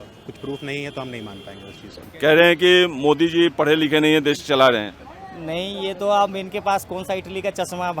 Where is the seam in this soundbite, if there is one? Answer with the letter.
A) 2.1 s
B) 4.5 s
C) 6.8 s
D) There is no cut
A